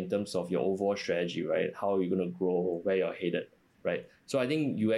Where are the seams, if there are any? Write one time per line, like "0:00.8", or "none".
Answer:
none